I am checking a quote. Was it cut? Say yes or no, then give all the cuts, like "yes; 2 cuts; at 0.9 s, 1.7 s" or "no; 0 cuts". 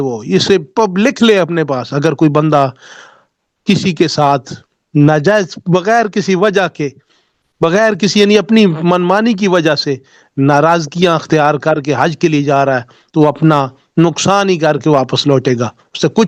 no; 0 cuts